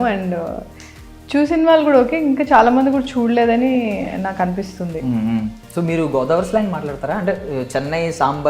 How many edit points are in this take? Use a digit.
1